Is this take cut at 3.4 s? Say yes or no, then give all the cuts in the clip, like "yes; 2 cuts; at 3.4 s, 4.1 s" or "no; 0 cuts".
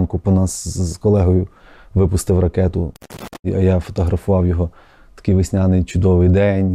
yes; 1 cut; at 3.4 s